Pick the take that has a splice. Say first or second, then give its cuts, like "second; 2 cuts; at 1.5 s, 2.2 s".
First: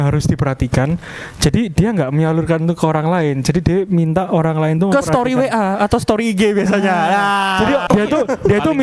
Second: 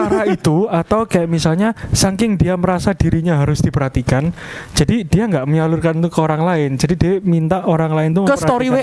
first; 1 cut; at 7.8 s